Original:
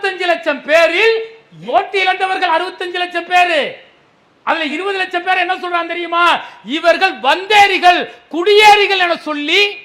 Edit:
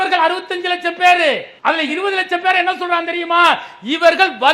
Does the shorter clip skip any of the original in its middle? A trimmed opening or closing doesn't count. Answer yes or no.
yes